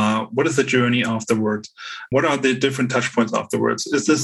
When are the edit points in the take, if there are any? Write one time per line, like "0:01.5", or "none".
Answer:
0:02.1